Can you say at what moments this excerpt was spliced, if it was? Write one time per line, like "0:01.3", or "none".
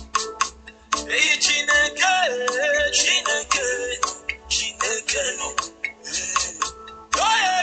0:01.0